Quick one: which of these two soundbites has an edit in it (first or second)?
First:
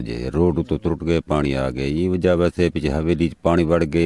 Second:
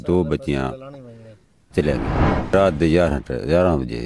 second